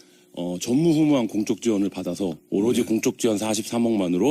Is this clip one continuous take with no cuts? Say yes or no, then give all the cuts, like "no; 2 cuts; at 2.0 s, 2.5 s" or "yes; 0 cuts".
no; 1 cut; at 3.0 s